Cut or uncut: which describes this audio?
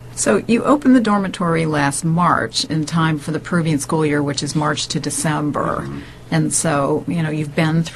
uncut